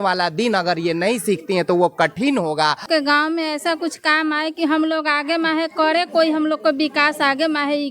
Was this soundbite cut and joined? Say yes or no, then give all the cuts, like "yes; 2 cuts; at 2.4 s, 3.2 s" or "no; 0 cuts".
yes; 1 cut; at 2.8 s